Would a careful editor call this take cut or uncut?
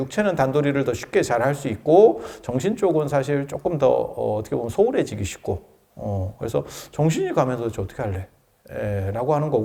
uncut